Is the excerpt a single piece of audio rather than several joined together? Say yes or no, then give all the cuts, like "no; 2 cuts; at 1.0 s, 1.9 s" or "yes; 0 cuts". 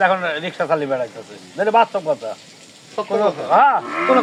yes; 0 cuts